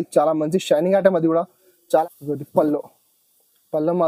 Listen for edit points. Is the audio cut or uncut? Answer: cut